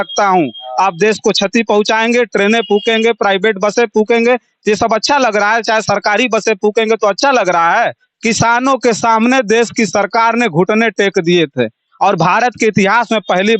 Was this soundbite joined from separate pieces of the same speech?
yes; 1 cut; at 8.1 s

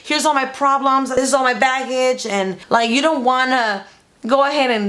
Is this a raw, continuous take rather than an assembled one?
no; 2 cuts; at 1.2 s, 2.6 s

